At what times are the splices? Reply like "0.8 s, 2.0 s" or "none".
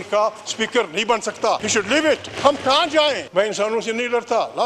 1.6 s, 2.3 s, 3.2 s